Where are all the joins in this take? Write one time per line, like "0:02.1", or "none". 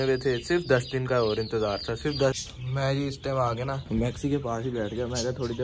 0:02.4